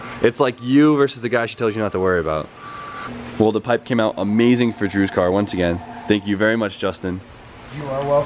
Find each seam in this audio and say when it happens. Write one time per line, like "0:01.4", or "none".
0:04.8